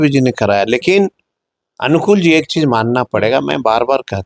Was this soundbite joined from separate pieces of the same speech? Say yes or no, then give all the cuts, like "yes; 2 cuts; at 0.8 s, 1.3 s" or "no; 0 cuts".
no; 0 cuts